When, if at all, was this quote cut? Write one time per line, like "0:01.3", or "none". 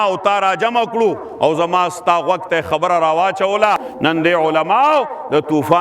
0:03.9